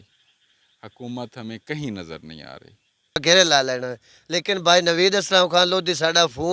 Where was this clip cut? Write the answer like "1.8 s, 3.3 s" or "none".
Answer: 3.2 s